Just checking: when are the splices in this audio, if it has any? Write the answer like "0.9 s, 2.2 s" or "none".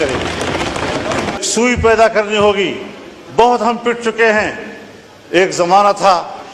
1.4 s